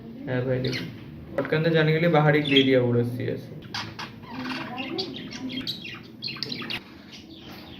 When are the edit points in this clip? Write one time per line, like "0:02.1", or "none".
0:06.8